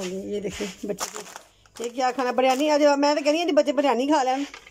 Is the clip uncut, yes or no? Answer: yes